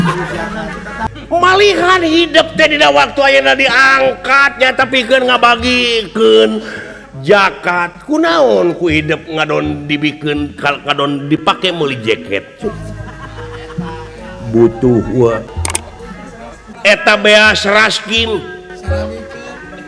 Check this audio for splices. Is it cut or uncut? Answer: uncut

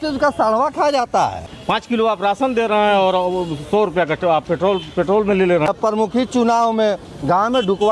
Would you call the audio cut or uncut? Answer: cut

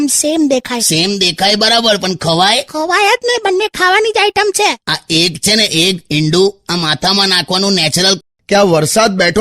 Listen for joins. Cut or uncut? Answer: cut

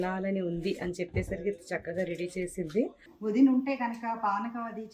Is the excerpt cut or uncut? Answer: cut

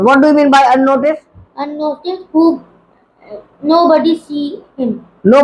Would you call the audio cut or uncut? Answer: uncut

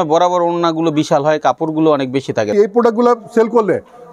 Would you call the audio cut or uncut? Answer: cut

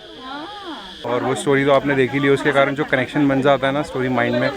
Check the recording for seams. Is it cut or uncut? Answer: cut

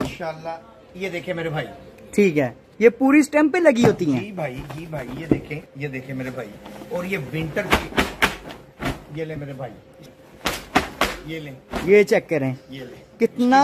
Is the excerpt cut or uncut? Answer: cut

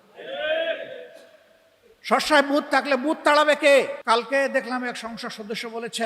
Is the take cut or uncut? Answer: cut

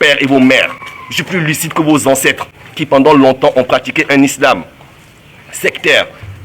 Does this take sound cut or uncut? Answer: uncut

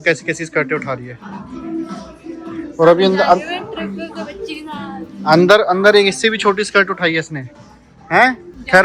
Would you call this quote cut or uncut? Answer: uncut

